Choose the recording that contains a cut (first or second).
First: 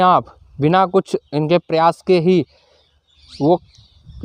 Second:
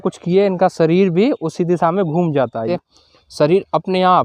second